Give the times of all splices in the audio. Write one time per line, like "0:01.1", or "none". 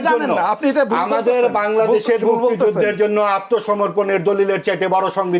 none